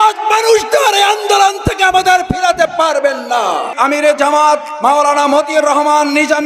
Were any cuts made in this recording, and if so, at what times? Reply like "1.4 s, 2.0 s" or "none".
3.7 s